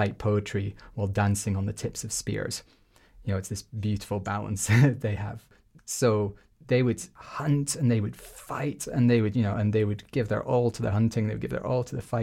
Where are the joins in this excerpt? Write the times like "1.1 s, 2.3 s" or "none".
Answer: 5.5 s, 7.1 s